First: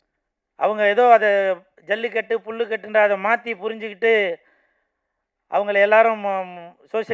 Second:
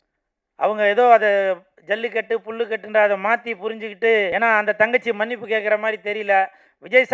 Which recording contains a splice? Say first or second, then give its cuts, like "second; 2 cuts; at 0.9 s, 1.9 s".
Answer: second; 1 cut; at 4.3 s